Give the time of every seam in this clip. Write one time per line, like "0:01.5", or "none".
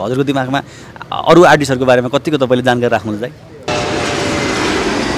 0:03.7